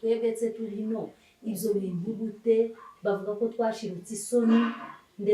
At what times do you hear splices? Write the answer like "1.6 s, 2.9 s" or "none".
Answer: none